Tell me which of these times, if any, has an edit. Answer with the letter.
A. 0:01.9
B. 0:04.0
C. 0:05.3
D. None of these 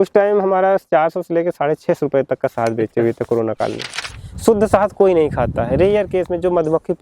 B